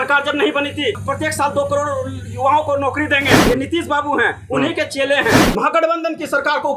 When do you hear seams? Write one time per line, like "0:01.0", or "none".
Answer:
0:01.0
0:03.4
0:05.4